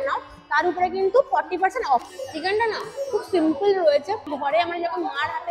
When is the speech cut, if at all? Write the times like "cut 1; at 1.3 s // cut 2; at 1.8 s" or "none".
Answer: cut 1; at 2.1 s // cut 2; at 4.3 s